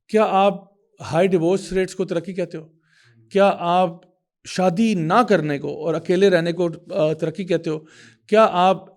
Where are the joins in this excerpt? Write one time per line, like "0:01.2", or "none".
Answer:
none